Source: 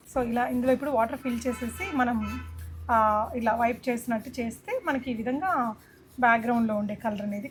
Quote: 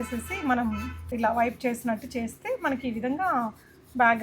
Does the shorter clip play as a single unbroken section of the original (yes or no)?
no